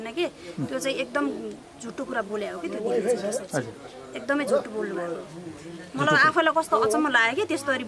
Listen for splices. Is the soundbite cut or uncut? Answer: uncut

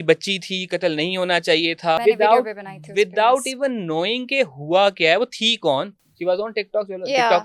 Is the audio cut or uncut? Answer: cut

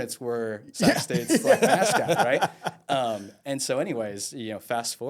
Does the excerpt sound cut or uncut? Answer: uncut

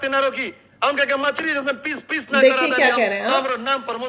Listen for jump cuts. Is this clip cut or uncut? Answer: uncut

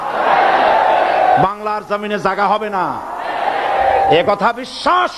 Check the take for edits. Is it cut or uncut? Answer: uncut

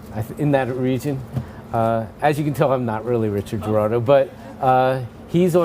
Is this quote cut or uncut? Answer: cut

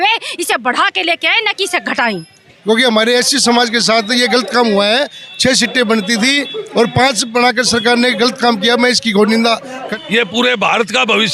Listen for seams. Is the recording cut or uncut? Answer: cut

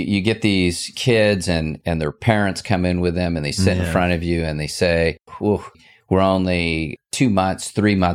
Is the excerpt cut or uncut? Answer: cut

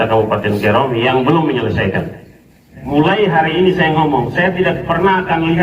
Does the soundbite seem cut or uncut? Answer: cut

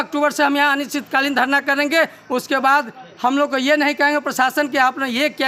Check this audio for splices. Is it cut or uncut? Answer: uncut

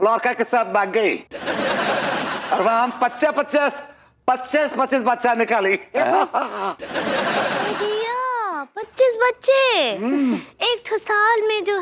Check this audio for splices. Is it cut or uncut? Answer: cut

